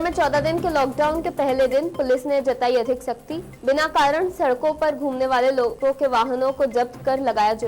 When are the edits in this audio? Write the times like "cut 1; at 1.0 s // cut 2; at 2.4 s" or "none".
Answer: none